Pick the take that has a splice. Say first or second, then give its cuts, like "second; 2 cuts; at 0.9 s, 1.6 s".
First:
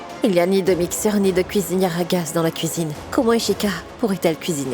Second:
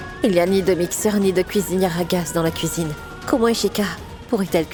first; 2 cuts; at 3.0 s, 3.9 s